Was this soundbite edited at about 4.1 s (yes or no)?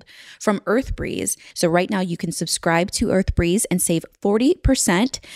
no